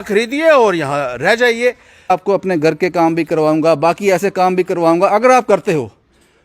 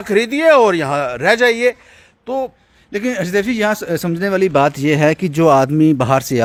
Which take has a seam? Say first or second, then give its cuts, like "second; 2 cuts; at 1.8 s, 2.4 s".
first; 1 cut; at 2.1 s